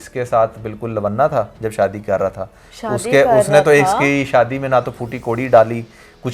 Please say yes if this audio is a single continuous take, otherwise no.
yes